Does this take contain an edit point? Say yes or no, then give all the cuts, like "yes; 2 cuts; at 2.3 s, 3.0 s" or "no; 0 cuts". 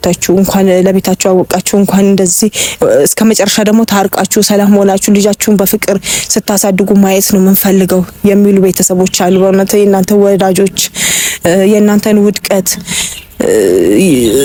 no; 0 cuts